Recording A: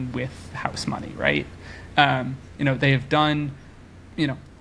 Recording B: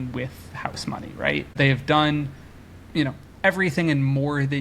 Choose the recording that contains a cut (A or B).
B